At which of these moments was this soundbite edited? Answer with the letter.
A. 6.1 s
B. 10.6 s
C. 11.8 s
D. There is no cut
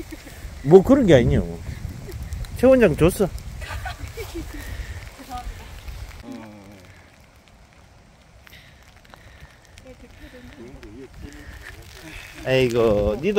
A